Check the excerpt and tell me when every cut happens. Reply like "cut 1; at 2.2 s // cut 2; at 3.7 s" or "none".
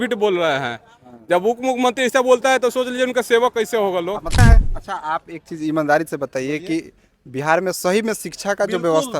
cut 1; at 4.4 s